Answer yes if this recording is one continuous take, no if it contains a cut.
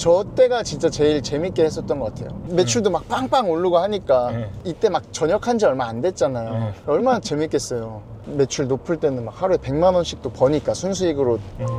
yes